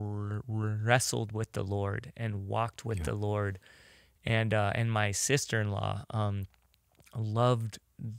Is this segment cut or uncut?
uncut